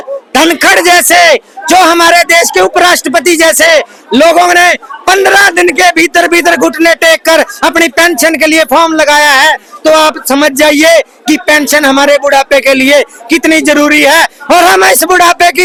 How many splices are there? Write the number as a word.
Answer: zero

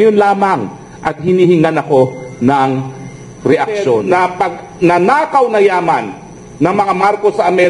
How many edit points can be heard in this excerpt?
one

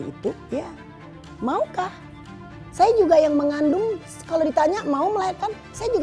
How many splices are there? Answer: zero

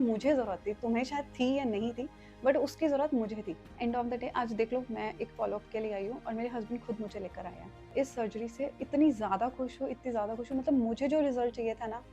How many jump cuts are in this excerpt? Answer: two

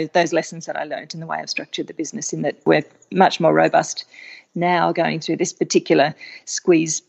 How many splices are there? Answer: one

